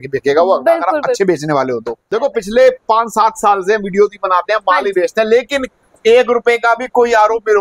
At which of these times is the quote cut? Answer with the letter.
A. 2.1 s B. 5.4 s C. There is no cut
A